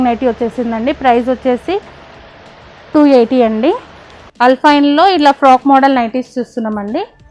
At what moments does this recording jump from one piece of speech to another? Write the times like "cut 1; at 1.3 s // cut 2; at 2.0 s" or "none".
cut 1; at 4.2 s